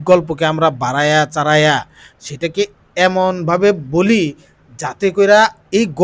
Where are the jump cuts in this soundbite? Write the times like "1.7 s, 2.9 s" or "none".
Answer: none

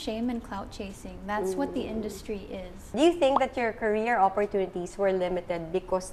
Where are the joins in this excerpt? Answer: 2.9 s

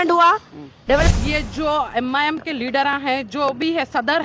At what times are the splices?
1.1 s

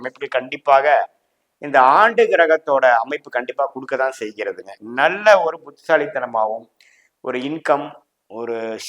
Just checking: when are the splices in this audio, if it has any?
4.8 s

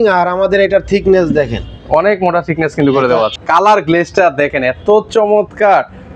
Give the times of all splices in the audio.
3.4 s

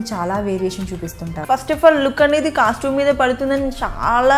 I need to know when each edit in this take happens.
1.4 s

